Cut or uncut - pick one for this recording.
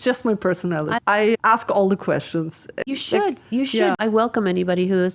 cut